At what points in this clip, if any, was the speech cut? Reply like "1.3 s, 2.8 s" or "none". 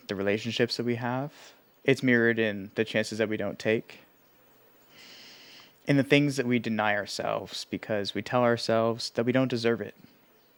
none